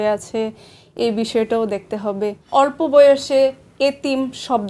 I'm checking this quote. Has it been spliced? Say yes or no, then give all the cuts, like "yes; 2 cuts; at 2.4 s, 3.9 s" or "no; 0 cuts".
yes; 1 cut; at 2.4 s